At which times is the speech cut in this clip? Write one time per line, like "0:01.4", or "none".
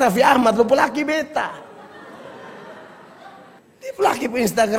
0:03.6